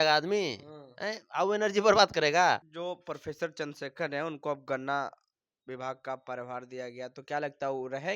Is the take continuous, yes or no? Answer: no